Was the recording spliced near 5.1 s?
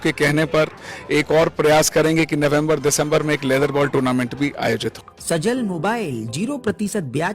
yes; 1 cut; at 5.1 s

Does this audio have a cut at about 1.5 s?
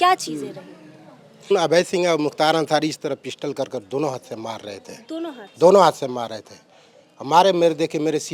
yes; 1 cut; at 1.5 s

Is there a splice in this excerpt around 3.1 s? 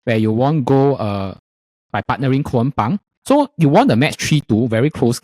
yes; 1 cut; at 3.1 s

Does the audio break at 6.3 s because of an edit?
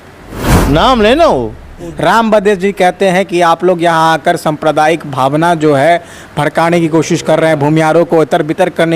no; 1 cut; at 1.8 s

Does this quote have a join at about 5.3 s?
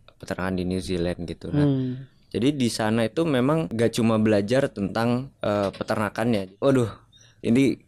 yes; 3 cuts; at 3.7 s, 5.3 s, 6.4 s

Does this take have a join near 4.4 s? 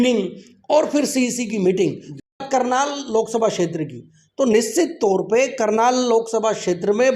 no; 1 cut; at 2.3 s

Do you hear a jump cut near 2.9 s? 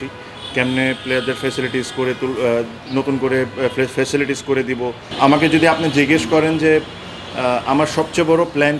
no; 1 cut; at 5.1 s

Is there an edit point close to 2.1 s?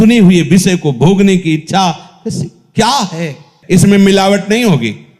no; 1 cut; at 3.5 s

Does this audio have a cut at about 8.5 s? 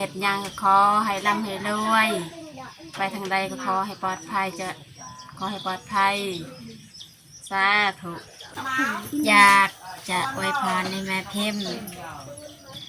yes; 1 cut; at 8.5 s

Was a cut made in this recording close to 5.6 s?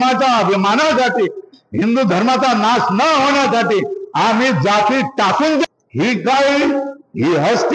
yes; 1 cut; at 5.6 s

